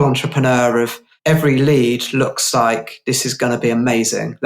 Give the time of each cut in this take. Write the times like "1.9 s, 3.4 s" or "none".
1.1 s